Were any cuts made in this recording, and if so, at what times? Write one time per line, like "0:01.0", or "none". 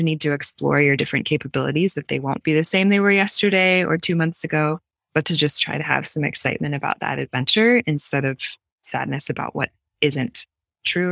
none